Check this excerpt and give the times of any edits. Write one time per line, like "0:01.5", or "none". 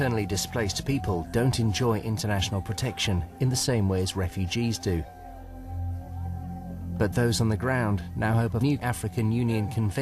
0:04.9